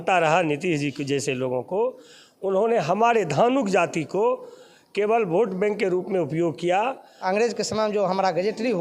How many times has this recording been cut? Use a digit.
1